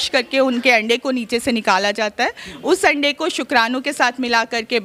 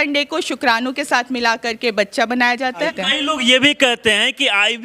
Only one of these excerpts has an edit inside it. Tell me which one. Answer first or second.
second